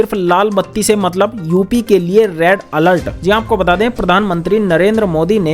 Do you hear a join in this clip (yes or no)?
no